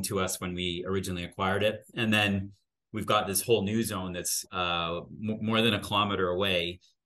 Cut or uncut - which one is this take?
cut